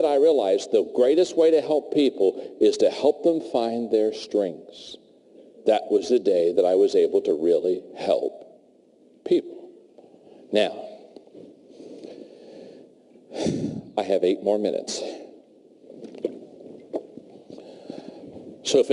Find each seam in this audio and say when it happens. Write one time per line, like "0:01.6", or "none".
0:02.0